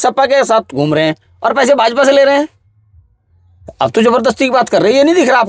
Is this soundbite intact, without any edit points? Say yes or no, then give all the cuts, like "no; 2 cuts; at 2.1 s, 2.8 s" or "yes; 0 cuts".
yes; 0 cuts